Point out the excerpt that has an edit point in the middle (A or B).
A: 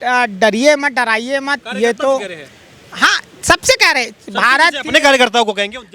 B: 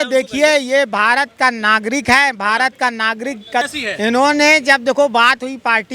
B